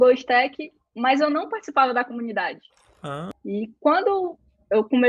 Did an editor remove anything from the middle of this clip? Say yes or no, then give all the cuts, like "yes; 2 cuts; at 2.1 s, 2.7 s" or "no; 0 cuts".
yes; 1 cut; at 3.3 s